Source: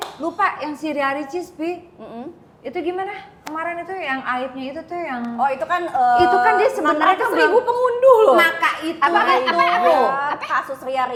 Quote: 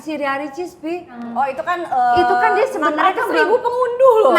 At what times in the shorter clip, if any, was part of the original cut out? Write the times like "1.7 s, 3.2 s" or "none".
1.2 s